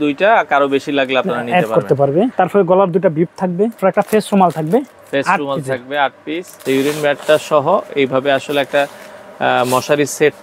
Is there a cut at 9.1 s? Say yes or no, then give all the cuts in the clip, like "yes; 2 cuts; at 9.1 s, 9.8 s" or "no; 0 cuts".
no; 3 cuts; at 2.3 s, 3.8 s, 6.6 s